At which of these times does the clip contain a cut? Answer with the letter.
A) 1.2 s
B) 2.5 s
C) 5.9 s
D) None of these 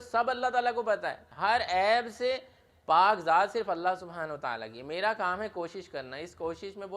A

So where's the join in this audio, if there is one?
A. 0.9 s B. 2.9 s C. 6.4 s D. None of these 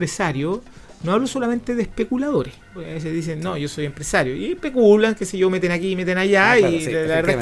B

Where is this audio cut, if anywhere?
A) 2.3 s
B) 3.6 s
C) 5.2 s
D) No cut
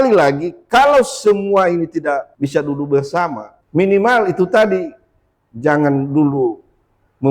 A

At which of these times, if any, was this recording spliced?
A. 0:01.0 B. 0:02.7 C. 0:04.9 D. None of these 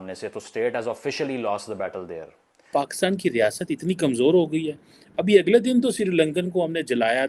B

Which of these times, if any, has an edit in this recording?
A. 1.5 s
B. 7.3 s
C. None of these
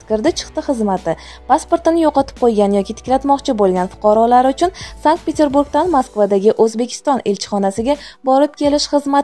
C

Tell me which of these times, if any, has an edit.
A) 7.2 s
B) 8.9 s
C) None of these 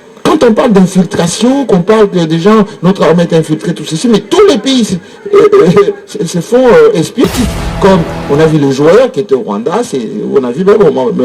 A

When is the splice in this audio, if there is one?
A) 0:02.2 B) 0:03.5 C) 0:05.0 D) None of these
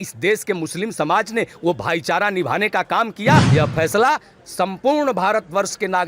B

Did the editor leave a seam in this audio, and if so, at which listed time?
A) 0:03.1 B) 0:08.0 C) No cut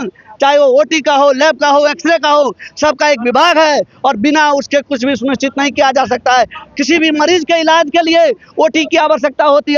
C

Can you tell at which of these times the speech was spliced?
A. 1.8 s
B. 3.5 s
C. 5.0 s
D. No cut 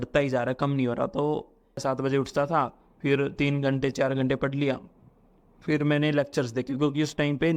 A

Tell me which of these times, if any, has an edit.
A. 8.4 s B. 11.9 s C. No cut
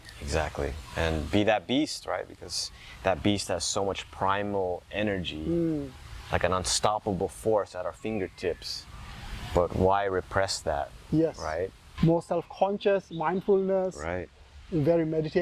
B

